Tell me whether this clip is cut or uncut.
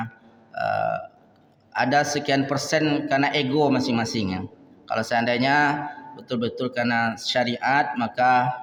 uncut